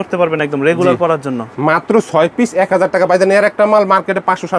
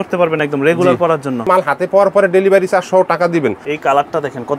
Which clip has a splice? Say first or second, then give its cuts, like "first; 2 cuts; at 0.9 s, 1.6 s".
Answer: second; 2 cuts; at 1.5 s, 3.7 s